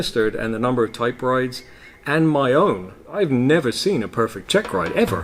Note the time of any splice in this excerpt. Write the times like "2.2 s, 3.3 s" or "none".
3.0 s, 4.4 s